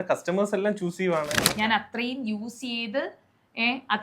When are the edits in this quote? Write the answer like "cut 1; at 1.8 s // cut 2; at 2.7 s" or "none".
cut 1; at 1.4 s